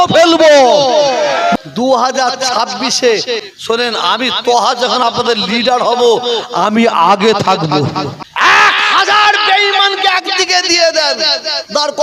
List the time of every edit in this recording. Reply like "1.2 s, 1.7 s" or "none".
1.5 s, 3.5 s, 8.2 s